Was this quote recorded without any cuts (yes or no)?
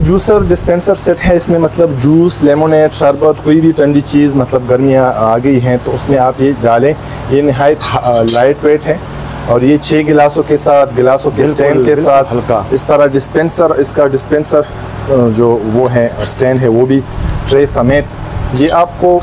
yes